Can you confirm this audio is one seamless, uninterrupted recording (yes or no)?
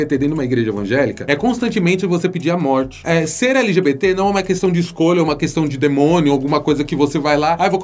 yes